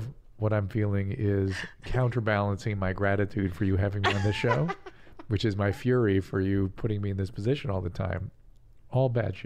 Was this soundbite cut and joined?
yes; 1 cut; at 8.3 s

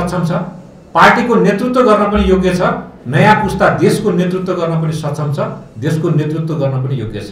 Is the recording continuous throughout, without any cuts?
yes; 0 cuts

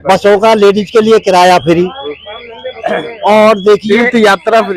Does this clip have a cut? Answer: no; 0 cuts

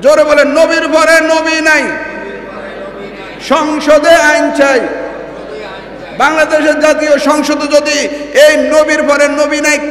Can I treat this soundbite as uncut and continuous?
yes; 0 cuts

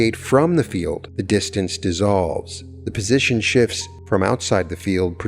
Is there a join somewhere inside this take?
yes; 2 cuts; at 1.1 s, 3.9 s

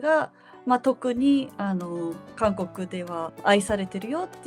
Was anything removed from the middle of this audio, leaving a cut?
yes; 1 cut; at 3.3 s

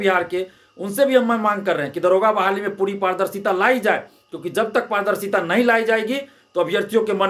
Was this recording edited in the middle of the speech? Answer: no; 0 cuts

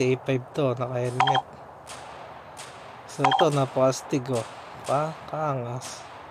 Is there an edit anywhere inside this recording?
no; 0 cuts

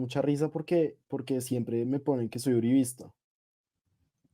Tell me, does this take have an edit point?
no; 0 cuts

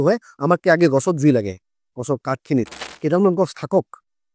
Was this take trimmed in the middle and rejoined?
yes; 1 cut; at 2.8 s

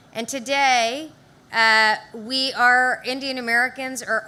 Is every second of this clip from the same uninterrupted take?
yes; 0 cuts

